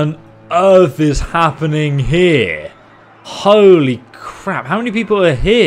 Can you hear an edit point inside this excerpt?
no; 0 cuts

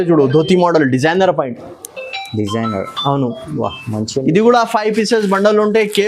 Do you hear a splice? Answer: no; 0 cuts

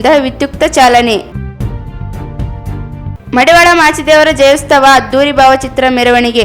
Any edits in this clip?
yes; 2 cuts; at 1.3 s, 3.2 s

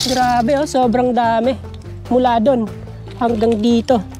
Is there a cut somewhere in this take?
no; 0 cuts

